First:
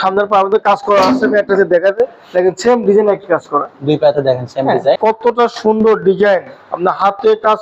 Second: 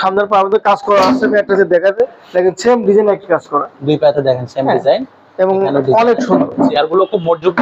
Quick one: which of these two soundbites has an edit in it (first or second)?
first